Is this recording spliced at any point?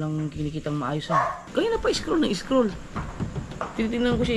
yes; 1 cut; at 1.4 s

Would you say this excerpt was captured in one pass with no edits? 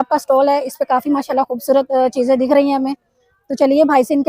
yes; 0 cuts

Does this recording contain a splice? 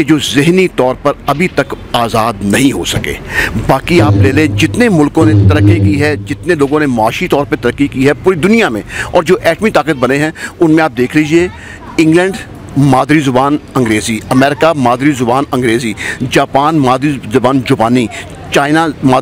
no; 0 cuts

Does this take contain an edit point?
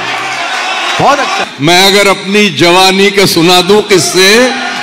yes; 1 cut; at 1.4 s

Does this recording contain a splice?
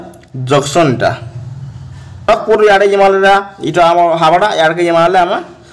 yes; 1 cut; at 2.3 s

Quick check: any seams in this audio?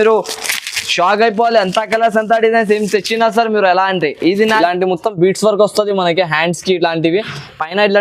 yes; 1 cut; at 4.6 s

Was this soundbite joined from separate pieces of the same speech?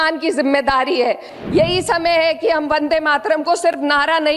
yes; 1 cut; at 1.3 s

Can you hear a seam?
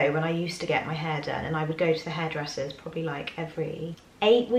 no; 0 cuts

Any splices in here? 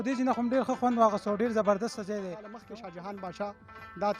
yes; 1 cut; at 2.6 s

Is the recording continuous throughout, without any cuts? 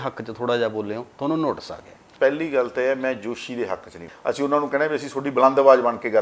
no; 2 cuts; at 2.0 s, 4.1 s

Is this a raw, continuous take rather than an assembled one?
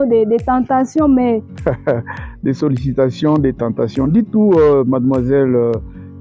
no; 1 cut; at 1.6 s

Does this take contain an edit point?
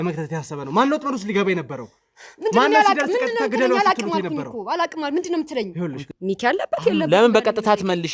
yes; 1 cut; at 6.1 s

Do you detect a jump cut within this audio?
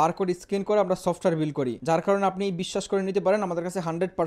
yes; 1 cut; at 1.8 s

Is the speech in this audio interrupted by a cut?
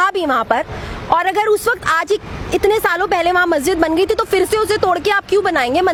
no; 0 cuts

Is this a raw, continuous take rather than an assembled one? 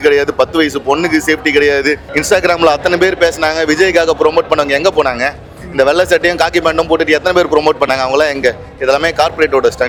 yes; 0 cuts

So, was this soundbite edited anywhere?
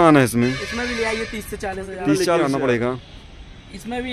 yes; 1 cut; at 2.4 s

